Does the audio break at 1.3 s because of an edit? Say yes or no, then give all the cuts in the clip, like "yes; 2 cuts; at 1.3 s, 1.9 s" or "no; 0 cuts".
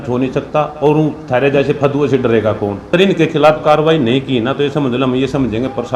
no; 1 cut; at 2.9 s